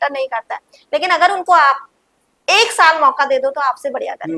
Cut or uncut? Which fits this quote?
uncut